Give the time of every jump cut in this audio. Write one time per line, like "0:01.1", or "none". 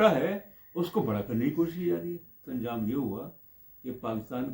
0:02.4